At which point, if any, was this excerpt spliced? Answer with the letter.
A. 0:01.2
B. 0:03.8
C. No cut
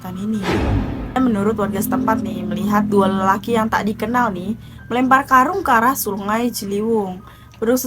A